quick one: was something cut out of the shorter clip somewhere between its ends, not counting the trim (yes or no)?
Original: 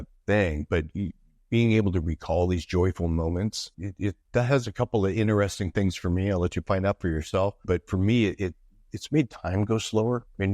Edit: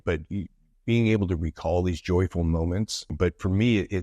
yes